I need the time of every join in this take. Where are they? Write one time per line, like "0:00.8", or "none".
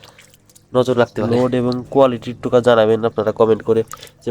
0:01.2